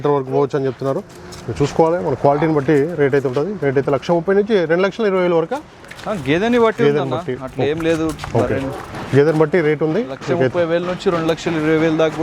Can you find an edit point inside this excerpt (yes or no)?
no